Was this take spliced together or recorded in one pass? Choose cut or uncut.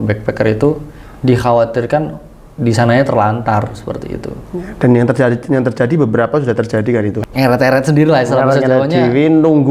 cut